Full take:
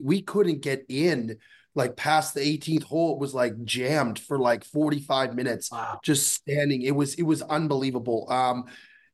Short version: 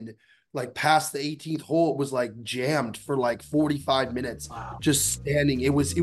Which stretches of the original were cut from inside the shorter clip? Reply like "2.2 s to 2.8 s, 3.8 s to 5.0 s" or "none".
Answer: none